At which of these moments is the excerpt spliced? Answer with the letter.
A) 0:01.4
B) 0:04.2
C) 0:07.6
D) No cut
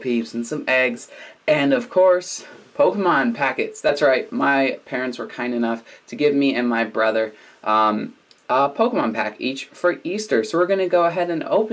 B